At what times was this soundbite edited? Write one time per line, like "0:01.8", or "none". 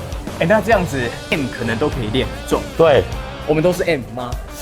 0:01.2

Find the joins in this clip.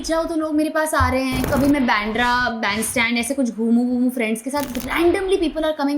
0:01.4

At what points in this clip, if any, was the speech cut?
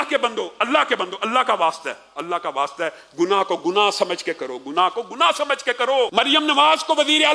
0:06.1

